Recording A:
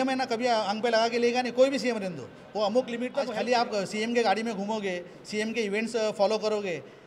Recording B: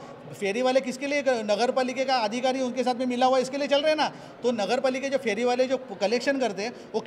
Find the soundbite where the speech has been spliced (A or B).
A